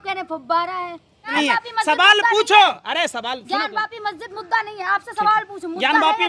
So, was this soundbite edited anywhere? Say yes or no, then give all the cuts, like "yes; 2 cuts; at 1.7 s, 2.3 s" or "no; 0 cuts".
yes; 1 cut; at 1.3 s